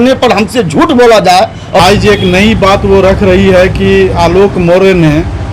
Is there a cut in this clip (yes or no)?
yes